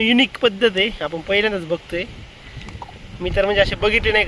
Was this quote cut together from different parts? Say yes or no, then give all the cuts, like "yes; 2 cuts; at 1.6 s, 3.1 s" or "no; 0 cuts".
no; 0 cuts